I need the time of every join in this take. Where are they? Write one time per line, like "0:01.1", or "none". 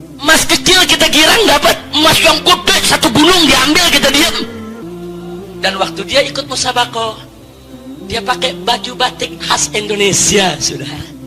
0:04.8